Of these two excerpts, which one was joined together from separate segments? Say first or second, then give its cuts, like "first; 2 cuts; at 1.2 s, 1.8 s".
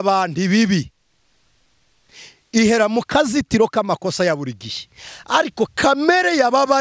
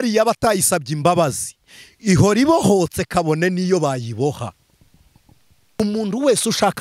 second; 1 cut; at 5.8 s